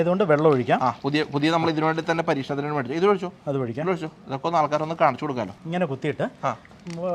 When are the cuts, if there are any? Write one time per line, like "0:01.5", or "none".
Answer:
0:05.6